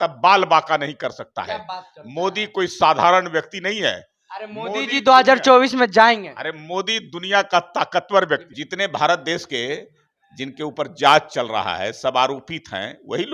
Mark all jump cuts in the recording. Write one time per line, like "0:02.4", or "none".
0:08.5